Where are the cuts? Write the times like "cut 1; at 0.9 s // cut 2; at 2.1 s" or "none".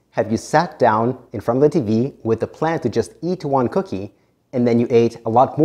none